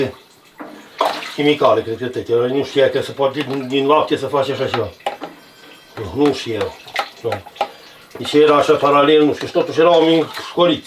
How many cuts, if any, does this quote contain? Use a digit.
0